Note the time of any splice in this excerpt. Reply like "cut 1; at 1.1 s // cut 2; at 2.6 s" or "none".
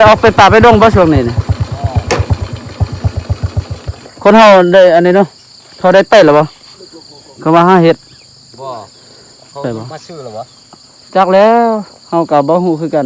none

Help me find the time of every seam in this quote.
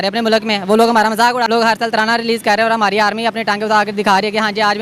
cut 1; at 1.5 s

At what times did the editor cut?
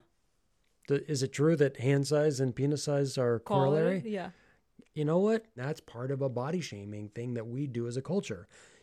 cut 1; at 3.4 s // cut 2; at 5.6 s

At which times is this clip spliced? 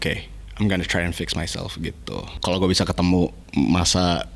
cut 1; at 2.4 s

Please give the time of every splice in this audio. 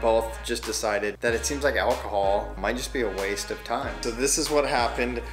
cut 1; at 1.2 s // cut 2; at 2.5 s // cut 3; at 3.9 s

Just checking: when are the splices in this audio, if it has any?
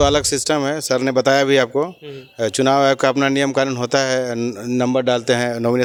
none

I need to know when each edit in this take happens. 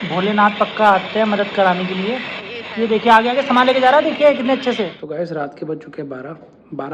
none

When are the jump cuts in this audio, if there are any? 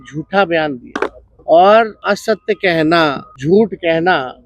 cut 1; at 0.8 s // cut 2; at 2.0 s // cut 3; at 3.3 s

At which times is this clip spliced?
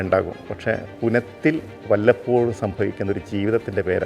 cut 1; at 0.8 s // cut 2; at 1.7 s

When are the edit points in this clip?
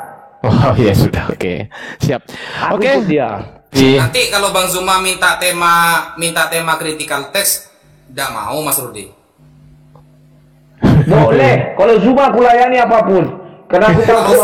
cut 1; at 3.7 s

